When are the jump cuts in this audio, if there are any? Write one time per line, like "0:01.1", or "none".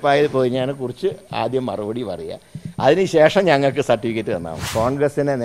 0:04.6

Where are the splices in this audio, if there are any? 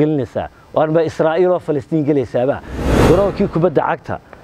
0:02.7

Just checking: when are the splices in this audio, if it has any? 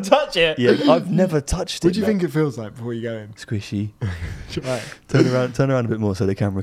0:01.7

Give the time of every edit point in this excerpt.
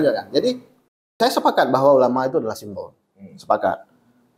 0:01.2

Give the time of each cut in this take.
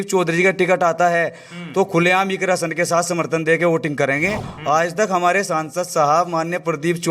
0:04.5

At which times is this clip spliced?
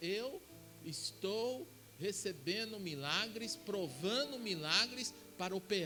none

